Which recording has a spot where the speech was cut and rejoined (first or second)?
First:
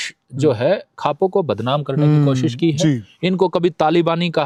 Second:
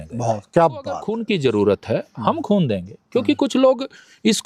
second